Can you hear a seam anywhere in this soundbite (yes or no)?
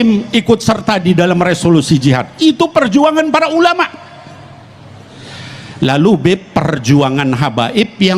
no